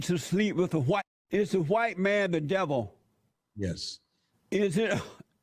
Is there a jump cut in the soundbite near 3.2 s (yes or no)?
no